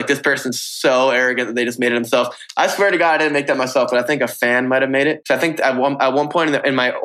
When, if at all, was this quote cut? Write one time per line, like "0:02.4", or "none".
0:05.2